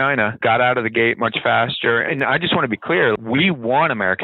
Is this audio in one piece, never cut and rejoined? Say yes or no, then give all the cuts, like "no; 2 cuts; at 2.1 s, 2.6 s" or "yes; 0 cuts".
no; 1 cut; at 2.1 s